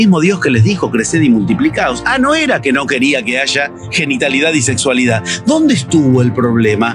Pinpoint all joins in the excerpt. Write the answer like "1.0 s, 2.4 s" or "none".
none